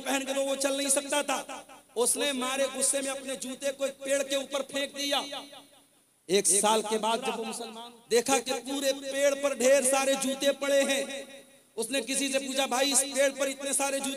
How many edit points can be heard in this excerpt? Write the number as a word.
one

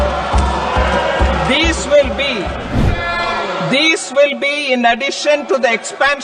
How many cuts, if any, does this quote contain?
one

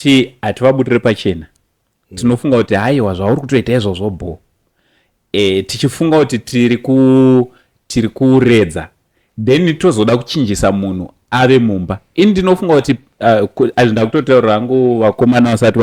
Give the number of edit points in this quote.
zero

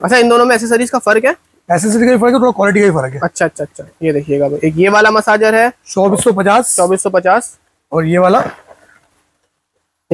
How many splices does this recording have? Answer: zero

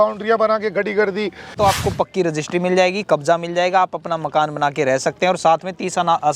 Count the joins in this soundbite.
one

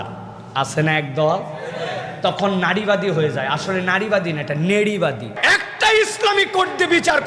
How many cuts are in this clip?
one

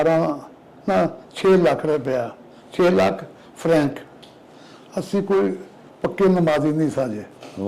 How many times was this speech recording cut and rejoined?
one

